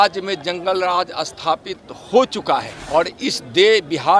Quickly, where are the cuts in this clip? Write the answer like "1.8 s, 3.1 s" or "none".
2.8 s